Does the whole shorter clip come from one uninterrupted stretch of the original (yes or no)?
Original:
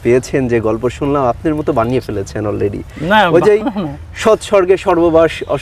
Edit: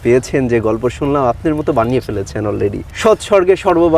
no